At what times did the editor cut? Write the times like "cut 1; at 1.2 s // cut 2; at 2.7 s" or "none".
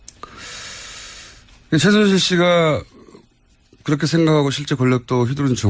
none